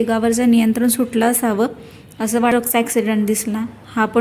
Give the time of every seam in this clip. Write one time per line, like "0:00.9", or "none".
0:02.5